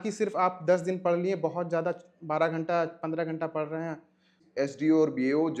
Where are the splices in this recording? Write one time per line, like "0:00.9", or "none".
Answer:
0:04.4